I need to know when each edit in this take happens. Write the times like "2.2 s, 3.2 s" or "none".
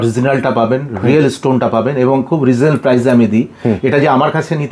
none

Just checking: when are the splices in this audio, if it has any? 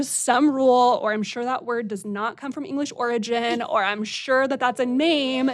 none

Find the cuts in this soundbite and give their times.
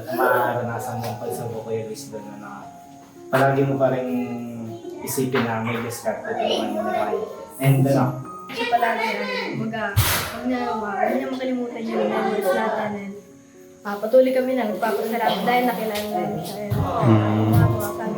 8.4 s

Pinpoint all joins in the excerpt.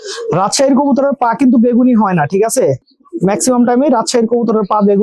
none

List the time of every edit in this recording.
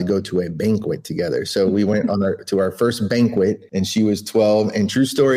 none

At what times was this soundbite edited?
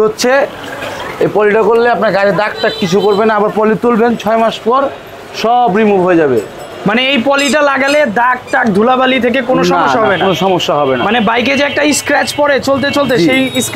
none

